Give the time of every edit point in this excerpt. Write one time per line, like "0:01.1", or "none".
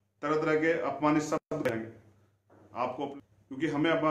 0:03.1